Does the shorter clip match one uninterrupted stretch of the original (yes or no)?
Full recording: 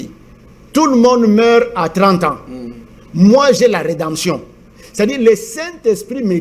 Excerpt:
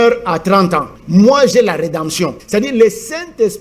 no